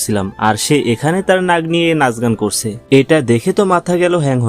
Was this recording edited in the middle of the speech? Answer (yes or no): yes